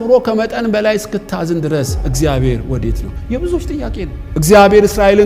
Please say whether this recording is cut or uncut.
cut